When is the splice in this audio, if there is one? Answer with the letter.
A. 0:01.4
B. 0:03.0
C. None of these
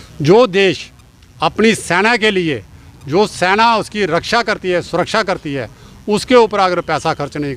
C